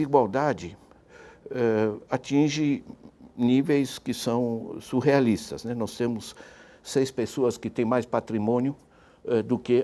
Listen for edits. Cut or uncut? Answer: uncut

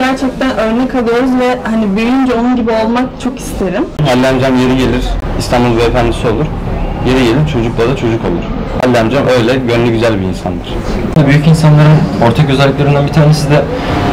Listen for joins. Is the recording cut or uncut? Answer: cut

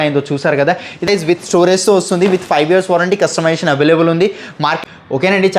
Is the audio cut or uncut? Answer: cut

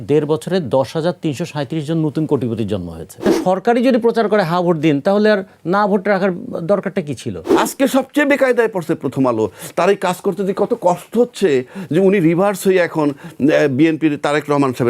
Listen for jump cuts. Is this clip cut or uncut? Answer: cut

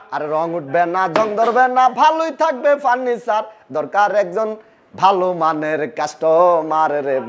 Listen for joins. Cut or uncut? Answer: uncut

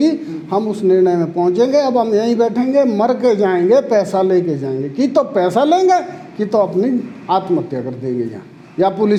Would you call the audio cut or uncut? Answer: uncut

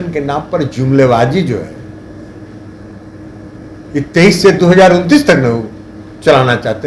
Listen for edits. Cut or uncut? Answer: uncut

